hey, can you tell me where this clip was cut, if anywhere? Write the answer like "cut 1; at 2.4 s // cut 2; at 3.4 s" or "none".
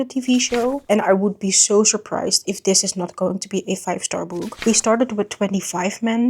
cut 1; at 0.8 s // cut 2; at 4.6 s